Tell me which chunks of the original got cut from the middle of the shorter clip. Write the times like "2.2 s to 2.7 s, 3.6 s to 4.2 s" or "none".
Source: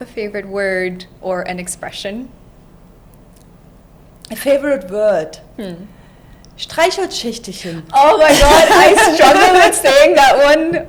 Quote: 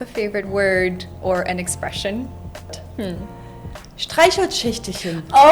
2.7 s to 5.3 s